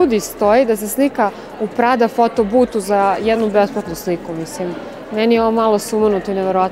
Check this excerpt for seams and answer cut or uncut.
uncut